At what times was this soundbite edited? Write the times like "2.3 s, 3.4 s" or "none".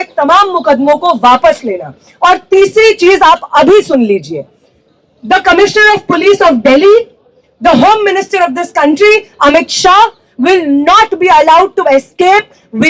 none